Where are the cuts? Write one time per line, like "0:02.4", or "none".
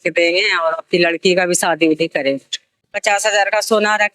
0:02.9